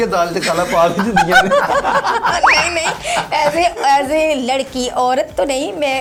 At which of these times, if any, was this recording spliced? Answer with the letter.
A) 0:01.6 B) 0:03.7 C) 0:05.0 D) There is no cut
D